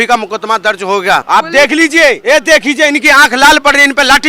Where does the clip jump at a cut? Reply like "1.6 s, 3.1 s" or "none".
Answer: 1.2 s, 2.2 s